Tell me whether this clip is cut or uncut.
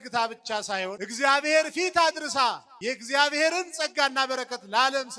cut